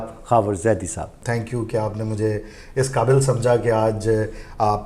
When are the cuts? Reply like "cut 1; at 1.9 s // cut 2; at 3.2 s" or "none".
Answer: cut 1; at 1.2 s